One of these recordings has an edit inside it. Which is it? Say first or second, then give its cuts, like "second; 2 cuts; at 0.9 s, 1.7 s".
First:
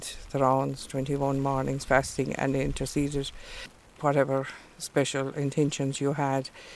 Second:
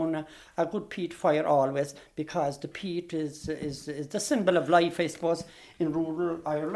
first; 1 cut; at 3.8 s